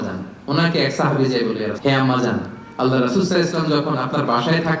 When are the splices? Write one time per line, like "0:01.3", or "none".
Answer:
0:01.7